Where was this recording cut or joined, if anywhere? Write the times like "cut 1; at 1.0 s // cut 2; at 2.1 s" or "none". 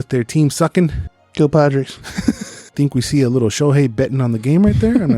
cut 1; at 2.7 s